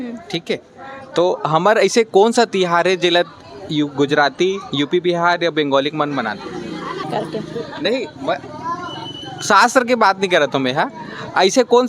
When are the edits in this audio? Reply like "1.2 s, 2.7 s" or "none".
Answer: 7.1 s